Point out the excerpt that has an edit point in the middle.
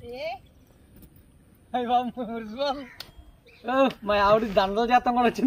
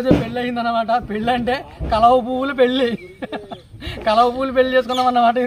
first; 1 cut; at 2.9 s

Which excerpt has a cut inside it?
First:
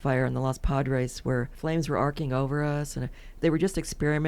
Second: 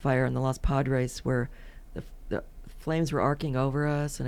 first; 2 cuts; at 1.5 s, 3.4 s

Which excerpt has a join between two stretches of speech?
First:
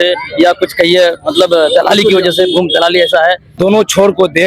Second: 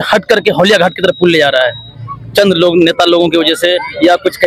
first; 1 cut; at 3.5 s

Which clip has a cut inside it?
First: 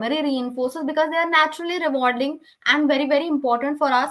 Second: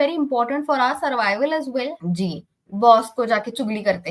second; 1 cut; at 2.0 s

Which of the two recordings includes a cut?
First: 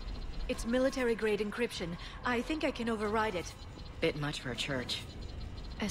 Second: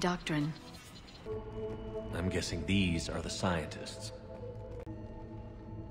second; 2 cuts; at 1.2 s, 4.8 s

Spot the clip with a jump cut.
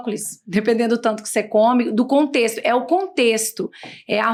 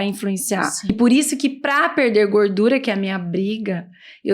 second; 1 cut; at 0.9 s

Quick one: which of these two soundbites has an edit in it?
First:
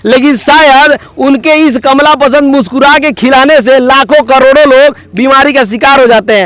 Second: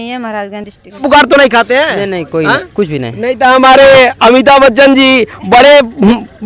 second; 1 cut; at 1.0 s

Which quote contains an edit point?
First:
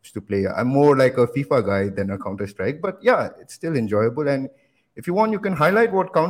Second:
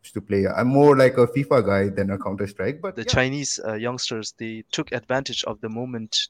second; 1 cut; at 2.9 s

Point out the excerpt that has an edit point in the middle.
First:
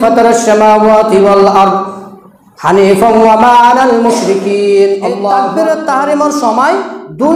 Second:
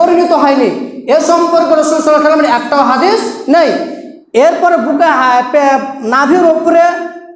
first; 1 cut; at 5.5 s

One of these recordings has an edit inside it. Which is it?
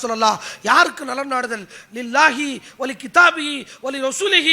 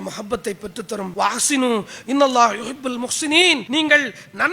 second; 2 cuts; at 1.1 s, 3.6 s

